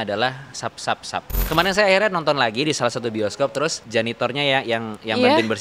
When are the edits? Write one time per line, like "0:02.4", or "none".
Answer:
0:01.4
0:03.8